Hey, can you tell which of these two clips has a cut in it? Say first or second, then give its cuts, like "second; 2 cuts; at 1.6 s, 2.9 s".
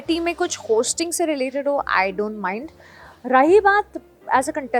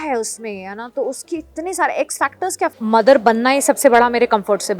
second; 1 cut; at 2.7 s